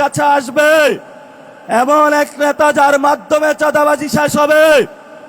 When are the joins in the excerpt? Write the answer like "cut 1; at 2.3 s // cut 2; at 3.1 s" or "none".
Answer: none